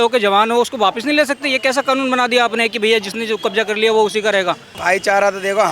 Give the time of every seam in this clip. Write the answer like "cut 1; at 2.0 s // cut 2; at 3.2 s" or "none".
cut 1; at 4.8 s